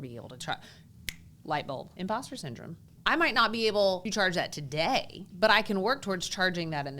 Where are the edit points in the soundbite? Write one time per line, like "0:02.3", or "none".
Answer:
0:01.9
0:02.8
0:04.1
0:05.3